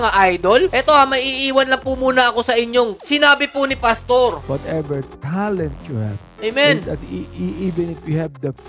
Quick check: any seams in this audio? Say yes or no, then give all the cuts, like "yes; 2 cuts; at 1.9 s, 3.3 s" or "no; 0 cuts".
yes; 1 cut; at 4.4 s